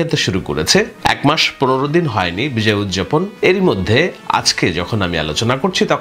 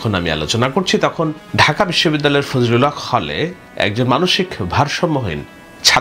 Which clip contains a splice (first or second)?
first